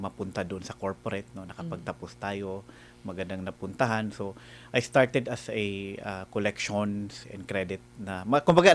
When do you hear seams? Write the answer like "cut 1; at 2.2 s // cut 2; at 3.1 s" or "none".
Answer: none